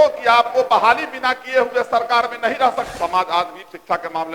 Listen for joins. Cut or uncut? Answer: cut